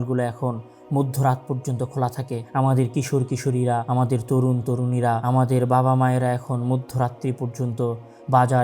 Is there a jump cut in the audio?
yes; 3 cuts; at 2.4 s, 3.9 s, 5.2 s

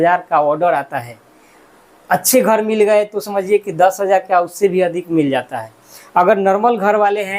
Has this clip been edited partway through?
no; 0 cuts

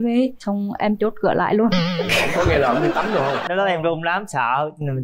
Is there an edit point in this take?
yes; 1 cut; at 3.5 s

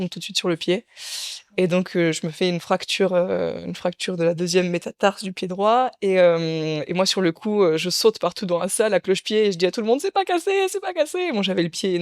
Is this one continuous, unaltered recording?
yes; 0 cuts

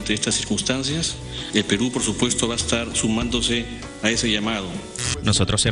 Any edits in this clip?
no; 0 cuts

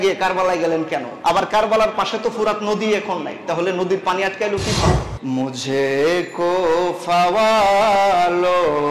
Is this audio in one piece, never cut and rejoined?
no; 2 cuts; at 1.1 s, 5.1 s

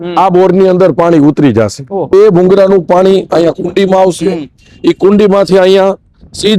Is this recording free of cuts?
no; 1 cut; at 2.1 s

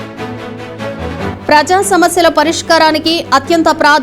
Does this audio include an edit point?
yes; 1 cut; at 1.1 s

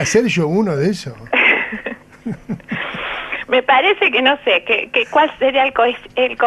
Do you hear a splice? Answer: yes; 1 cut; at 4.5 s

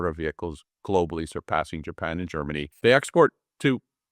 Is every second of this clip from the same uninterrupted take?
no; 1 cut; at 2.7 s

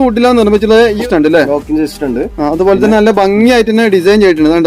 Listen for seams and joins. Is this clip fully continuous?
no; 1 cut; at 1.0 s

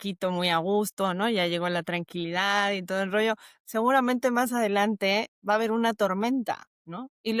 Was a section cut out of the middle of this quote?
no; 0 cuts

